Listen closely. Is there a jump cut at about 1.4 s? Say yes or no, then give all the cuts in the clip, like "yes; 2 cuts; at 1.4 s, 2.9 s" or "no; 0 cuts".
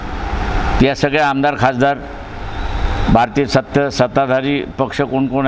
no; 0 cuts